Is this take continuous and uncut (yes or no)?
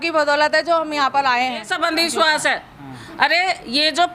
no